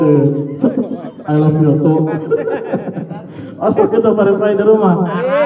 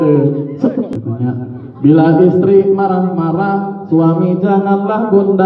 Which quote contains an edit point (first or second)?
second